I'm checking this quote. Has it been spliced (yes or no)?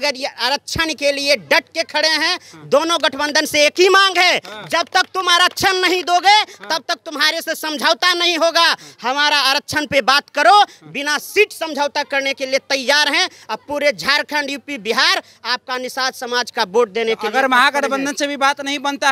no